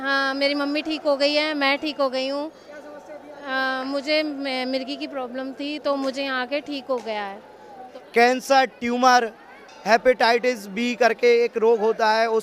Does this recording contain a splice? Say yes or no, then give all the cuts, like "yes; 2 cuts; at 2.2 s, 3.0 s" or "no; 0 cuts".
yes; 1 cut; at 7.8 s